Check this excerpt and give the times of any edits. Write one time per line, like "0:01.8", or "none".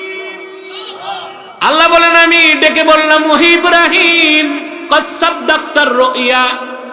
none

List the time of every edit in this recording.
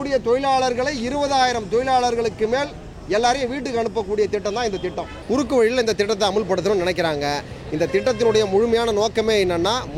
0:05.1

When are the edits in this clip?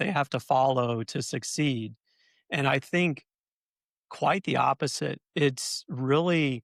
none

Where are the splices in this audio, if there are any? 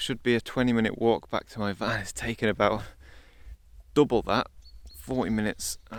none

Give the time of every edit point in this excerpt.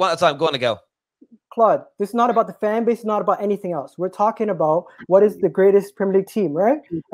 none

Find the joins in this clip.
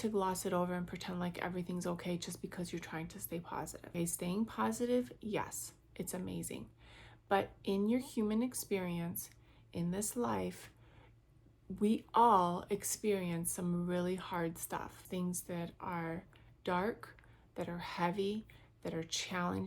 0:03.8
0:15.0

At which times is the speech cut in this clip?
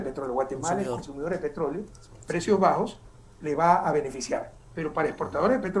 none

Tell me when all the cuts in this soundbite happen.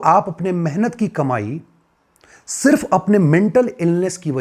none

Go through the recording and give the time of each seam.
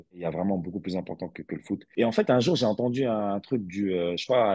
0:01.9

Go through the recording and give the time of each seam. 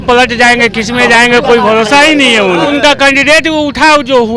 0:02.7

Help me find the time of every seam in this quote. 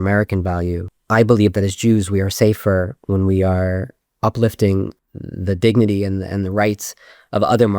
0:00.9

